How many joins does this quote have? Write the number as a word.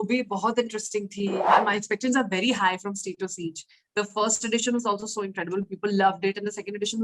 one